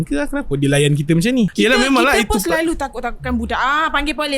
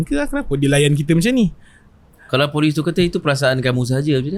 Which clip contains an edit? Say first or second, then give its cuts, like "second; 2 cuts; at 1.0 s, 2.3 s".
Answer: first; 1 cut; at 1.5 s